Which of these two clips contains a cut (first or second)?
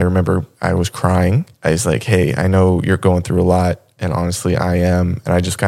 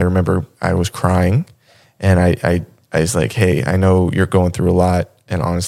first